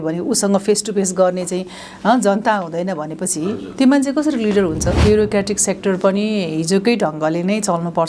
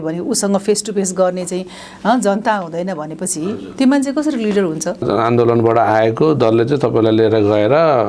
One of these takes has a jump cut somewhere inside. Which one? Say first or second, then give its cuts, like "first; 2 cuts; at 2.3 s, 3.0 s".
first; 1 cut; at 5.0 s